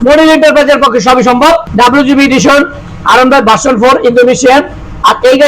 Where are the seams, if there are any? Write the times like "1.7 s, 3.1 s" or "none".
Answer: 1.7 s